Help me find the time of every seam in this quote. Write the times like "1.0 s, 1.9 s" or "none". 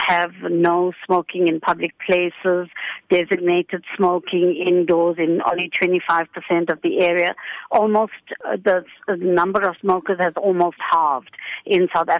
8.4 s, 9.8 s